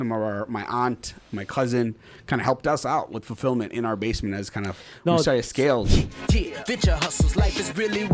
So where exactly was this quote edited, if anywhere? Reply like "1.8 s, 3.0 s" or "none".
5.9 s